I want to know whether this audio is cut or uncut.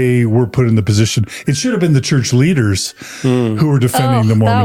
uncut